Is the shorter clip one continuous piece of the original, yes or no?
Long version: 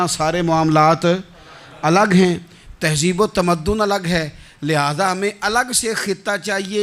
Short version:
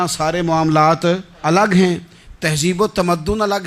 no